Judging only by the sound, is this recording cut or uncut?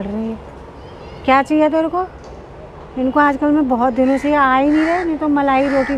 uncut